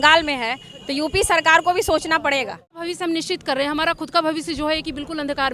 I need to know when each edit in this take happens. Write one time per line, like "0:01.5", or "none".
0:02.8